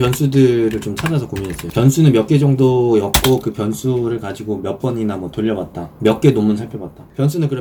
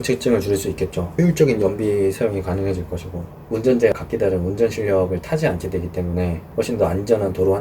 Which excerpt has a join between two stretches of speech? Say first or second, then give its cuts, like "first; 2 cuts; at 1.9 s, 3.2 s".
second; 3 cuts; at 1.0 s, 3.3 s, 4.0 s